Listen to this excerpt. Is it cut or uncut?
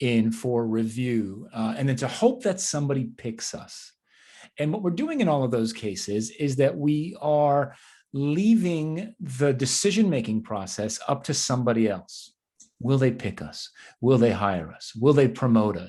uncut